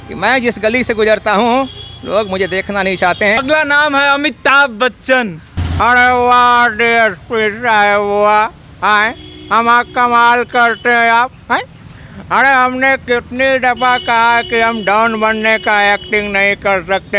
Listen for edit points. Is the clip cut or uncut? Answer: uncut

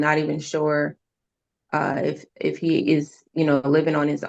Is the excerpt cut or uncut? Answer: cut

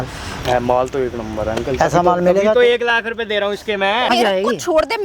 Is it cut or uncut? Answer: cut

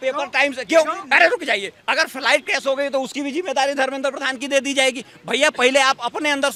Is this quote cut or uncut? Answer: uncut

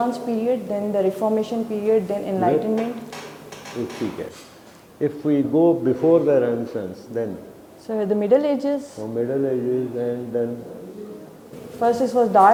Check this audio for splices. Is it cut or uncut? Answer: uncut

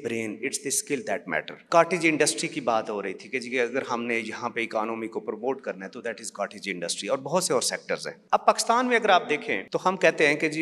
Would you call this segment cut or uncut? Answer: cut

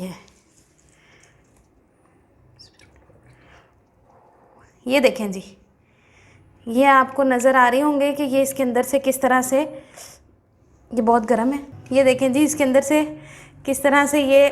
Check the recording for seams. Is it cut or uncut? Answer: uncut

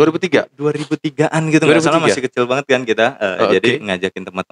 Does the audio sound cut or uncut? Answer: uncut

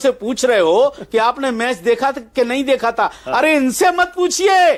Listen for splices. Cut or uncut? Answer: uncut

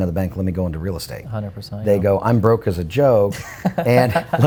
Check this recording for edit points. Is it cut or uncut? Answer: uncut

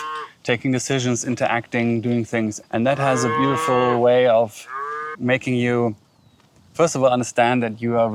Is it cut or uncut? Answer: uncut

